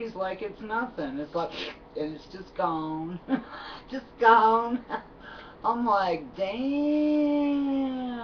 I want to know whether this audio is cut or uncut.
cut